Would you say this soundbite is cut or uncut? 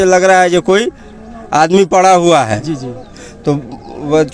uncut